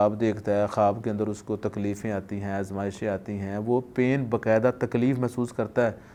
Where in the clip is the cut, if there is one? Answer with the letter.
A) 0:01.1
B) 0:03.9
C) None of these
C